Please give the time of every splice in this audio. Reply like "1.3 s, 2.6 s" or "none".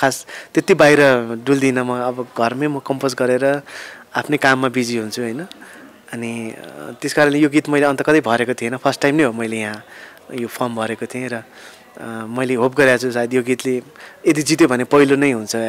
none

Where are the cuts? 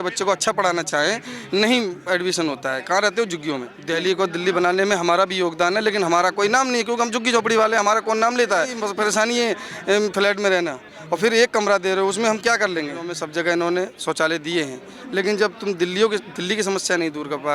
3.7 s, 8.8 s, 13.2 s

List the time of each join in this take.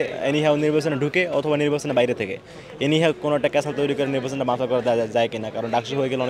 none

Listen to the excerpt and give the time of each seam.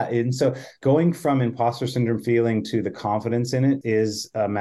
1.0 s, 3.8 s

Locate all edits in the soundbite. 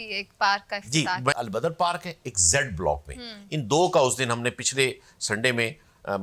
1.3 s

